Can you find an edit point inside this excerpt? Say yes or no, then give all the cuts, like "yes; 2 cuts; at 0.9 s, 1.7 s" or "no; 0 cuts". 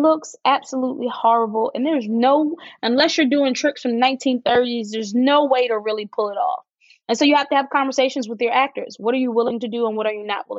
no; 0 cuts